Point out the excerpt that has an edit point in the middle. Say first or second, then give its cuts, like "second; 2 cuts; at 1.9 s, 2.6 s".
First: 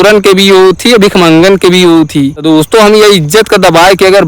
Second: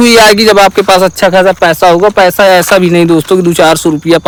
first; 1 cut; at 2.3 s